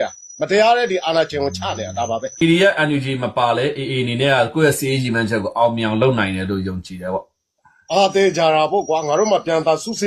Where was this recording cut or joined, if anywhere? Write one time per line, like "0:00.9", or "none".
0:02.3